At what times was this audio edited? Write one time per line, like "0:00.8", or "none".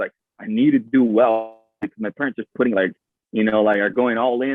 none